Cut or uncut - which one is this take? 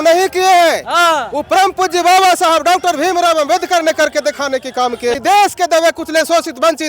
cut